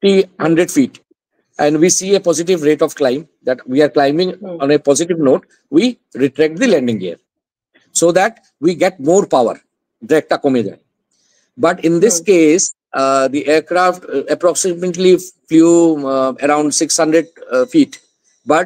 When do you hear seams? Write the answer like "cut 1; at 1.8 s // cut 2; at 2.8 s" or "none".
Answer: none